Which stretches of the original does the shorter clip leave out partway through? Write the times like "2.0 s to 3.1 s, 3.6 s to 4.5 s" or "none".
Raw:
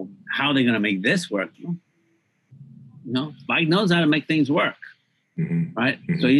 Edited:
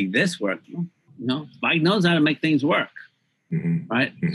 1.9 s to 2.9 s